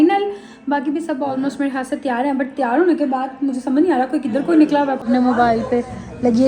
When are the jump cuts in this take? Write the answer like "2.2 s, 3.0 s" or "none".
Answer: 5.0 s